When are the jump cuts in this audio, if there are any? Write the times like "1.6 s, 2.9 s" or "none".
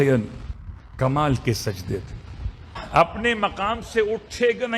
2.8 s